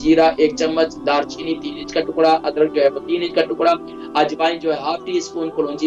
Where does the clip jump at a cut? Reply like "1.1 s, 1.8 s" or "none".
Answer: none